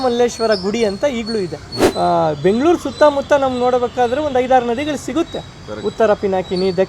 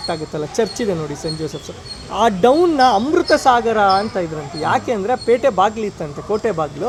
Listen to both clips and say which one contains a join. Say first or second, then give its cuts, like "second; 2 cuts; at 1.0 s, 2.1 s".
first; 1 cut; at 1.8 s